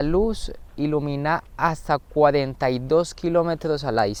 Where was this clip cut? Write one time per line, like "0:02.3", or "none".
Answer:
none